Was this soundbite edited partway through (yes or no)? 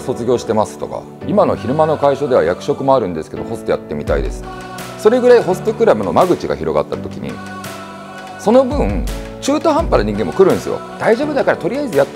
yes